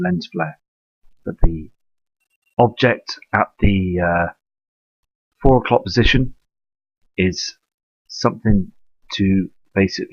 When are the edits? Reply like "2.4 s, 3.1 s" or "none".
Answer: 8.9 s